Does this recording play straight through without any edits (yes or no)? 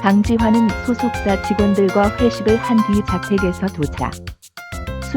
no